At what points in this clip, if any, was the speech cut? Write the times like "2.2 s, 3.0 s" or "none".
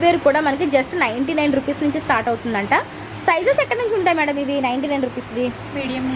none